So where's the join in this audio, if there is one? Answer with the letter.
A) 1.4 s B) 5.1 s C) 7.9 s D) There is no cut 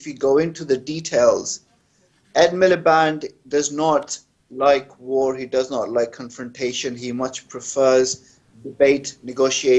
A